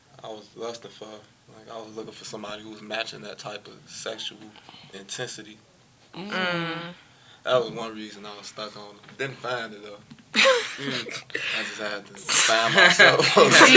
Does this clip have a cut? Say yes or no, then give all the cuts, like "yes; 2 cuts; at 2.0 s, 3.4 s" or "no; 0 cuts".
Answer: no; 0 cuts